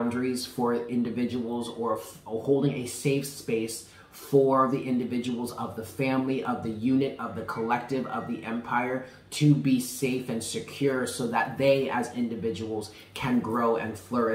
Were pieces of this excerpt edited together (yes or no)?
no